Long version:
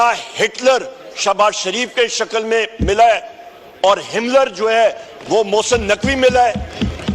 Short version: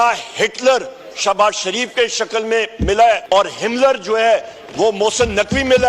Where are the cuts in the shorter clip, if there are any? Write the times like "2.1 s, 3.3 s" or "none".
3.2 s